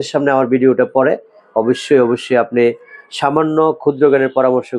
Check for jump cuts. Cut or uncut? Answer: uncut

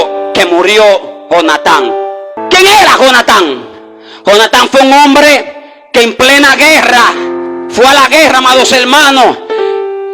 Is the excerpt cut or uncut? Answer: cut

